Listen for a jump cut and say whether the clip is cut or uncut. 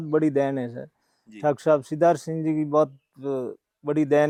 uncut